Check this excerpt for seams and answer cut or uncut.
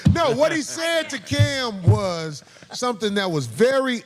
uncut